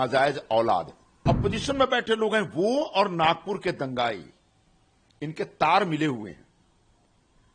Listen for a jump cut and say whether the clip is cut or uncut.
cut